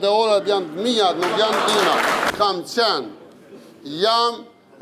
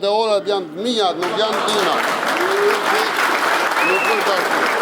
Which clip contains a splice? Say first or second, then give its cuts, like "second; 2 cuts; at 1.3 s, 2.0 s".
first; 1 cut; at 2.3 s